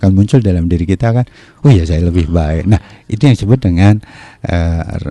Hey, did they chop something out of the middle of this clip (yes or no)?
no